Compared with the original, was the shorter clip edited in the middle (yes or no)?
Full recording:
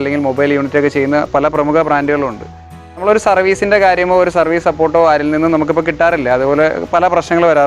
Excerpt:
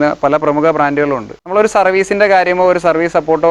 yes